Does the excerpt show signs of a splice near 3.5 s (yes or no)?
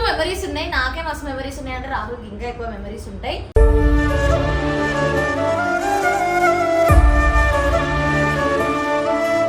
no